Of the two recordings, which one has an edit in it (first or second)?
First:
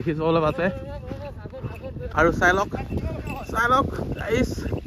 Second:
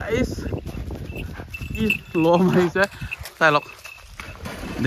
first